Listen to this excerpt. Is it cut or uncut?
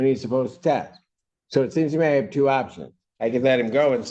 uncut